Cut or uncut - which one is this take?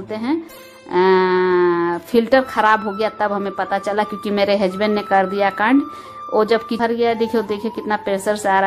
cut